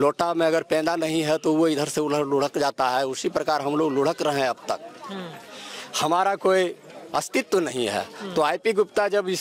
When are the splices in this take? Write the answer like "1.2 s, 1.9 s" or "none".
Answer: none